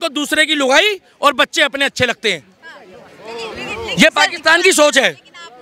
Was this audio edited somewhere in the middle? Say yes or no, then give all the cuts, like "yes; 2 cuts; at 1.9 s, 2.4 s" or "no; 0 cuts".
no; 0 cuts